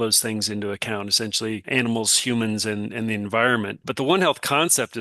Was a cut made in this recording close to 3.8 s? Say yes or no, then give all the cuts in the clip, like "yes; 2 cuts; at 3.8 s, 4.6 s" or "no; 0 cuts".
yes; 2 cuts; at 1.6 s, 3.8 s